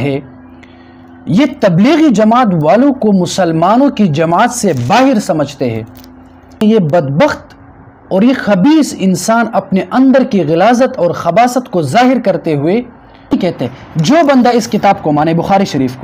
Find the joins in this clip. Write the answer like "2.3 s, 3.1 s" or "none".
6.6 s, 13.3 s